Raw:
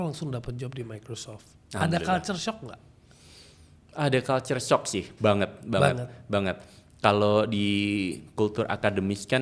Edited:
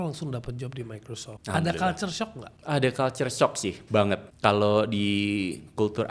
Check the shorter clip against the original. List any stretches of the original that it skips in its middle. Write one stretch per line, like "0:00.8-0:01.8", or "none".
0:01.3-0:01.6
0:02.7-0:03.8
0:05.6-0:06.9